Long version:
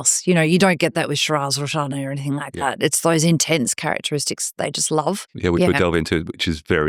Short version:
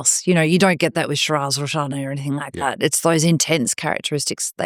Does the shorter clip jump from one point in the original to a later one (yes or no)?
no